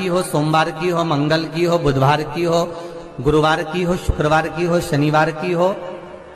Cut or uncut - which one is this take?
uncut